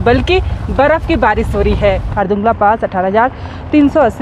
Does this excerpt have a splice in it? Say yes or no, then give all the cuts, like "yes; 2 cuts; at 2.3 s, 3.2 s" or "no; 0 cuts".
yes; 1 cut; at 2.1 s